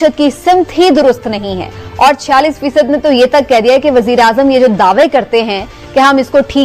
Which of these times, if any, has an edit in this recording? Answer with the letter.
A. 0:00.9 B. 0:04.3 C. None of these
C